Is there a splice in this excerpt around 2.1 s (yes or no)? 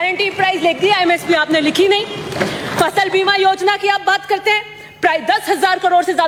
no